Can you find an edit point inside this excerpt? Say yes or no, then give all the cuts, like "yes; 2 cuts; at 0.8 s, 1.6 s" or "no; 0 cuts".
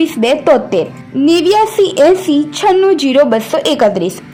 no; 0 cuts